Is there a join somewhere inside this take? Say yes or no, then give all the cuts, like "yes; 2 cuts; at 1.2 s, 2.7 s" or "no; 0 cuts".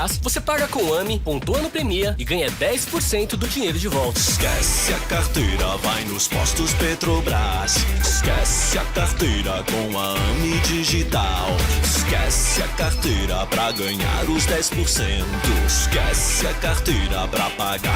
no; 0 cuts